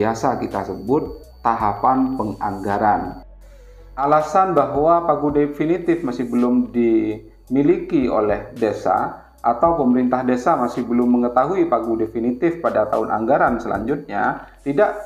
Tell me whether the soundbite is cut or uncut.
cut